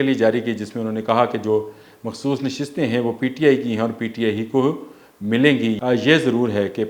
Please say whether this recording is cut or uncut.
cut